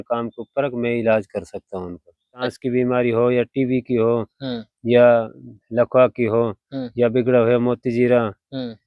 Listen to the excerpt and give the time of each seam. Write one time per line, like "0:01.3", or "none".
0:02.5